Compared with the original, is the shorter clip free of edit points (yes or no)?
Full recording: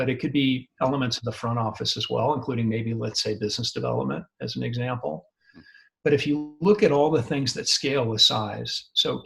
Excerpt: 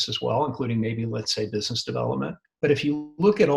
no